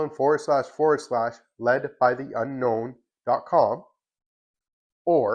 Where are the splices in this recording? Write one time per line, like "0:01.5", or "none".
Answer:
none